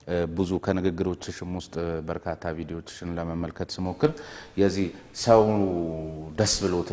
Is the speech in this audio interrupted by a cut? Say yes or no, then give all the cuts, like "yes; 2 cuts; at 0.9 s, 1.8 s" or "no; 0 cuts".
no; 0 cuts